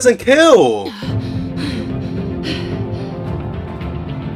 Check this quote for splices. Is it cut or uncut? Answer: uncut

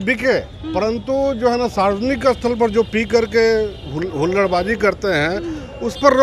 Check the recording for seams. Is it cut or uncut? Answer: uncut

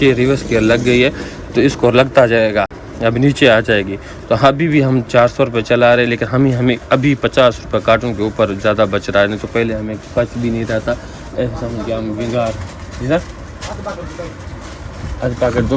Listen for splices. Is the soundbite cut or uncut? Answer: uncut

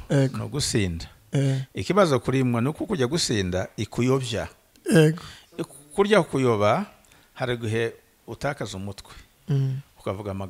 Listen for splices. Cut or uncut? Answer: uncut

